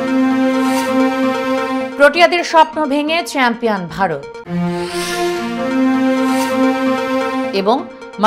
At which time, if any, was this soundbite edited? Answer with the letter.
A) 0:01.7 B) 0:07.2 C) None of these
C